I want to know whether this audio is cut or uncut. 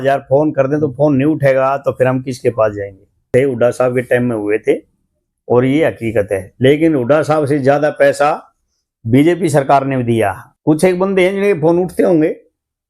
cut